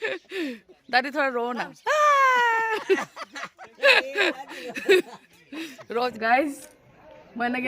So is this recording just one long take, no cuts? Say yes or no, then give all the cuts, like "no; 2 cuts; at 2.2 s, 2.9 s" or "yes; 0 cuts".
no; 1 cut; at 6.1 s